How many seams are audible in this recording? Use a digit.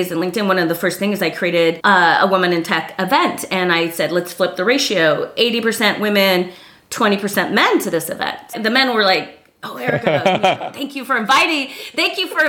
2